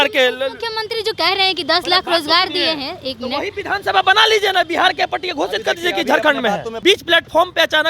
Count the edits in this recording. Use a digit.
1